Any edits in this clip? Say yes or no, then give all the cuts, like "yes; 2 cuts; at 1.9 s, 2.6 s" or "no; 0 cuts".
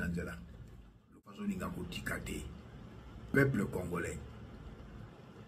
yes; 1 cut; at 1.2 s